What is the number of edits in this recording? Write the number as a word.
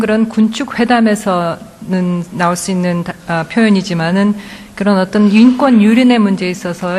zero